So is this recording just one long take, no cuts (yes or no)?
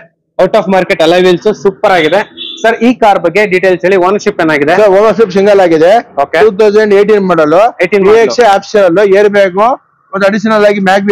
yes